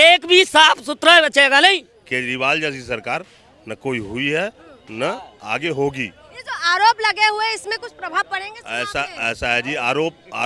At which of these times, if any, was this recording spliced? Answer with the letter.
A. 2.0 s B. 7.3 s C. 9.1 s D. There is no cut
A